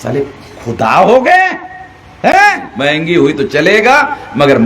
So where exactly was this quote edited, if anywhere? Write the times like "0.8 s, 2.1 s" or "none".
2.7 s